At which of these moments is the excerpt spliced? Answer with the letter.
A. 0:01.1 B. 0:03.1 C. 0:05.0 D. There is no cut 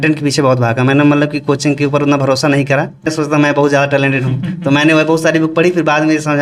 B